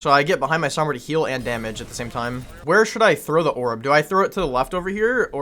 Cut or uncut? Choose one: cut